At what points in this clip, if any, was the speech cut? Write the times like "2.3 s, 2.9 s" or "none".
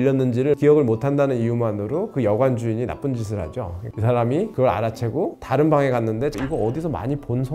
3.9 s, 6.4 s